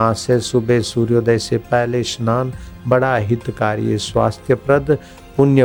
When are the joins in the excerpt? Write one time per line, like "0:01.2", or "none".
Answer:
none